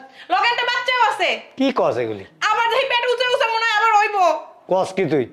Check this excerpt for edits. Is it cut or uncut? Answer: uncut